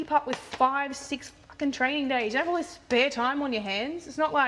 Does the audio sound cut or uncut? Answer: uncut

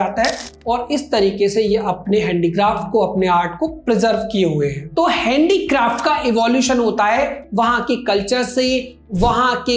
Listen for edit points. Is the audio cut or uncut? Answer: cut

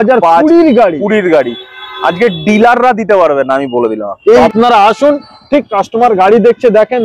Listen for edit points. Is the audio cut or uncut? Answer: cut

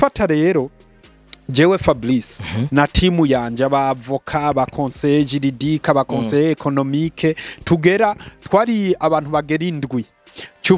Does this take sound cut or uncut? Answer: uncut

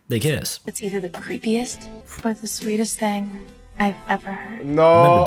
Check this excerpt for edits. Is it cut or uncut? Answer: uncut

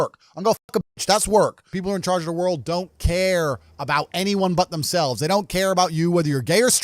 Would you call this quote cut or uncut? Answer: cut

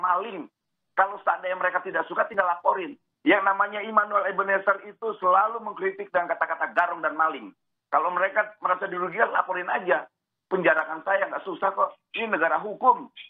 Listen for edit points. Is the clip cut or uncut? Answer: uncut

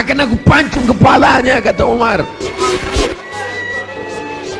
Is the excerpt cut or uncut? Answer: cut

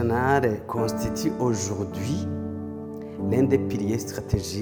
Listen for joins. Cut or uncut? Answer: uncut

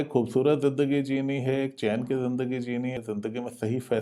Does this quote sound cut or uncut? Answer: uncut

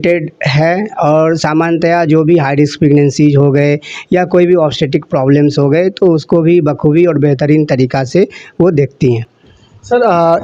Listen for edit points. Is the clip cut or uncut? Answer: uncut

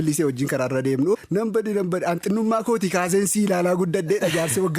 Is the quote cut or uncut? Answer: cut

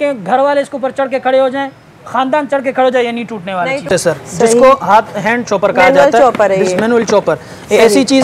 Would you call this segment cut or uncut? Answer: cut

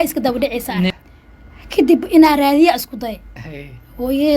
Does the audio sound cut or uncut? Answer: cut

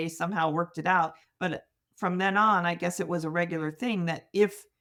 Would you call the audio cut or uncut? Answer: uncut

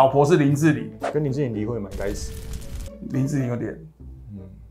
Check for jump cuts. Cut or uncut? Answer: uncut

